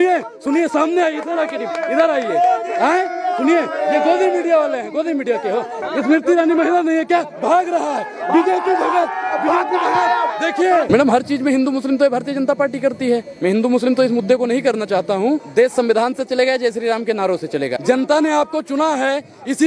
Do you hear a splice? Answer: yes; 4 cuts; at 5.8 s, 10.9 s, 15.5 s, 17.8 s

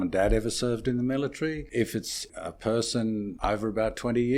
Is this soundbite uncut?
no; 2 cuts; at 2.2 s, 3.3 s

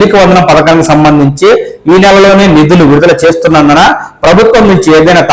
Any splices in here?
no; 0 cuts

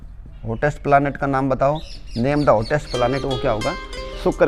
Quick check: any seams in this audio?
no; 0 cuts

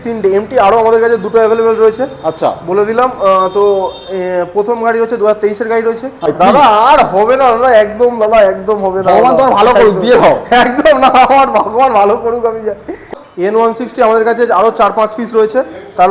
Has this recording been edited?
yes; 2 cuts; at 6.3 s, 13.1 s

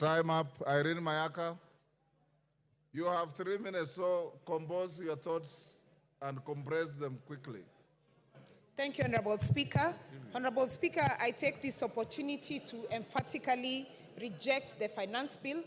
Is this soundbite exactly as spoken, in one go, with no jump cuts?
no; 1 cut; at 3.0 s

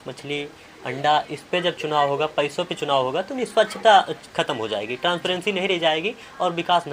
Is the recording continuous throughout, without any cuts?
yes; 0 cuts

